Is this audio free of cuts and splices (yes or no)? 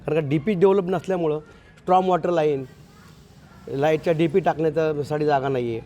yes